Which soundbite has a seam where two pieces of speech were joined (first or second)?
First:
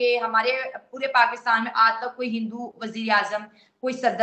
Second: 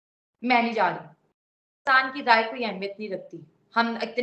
second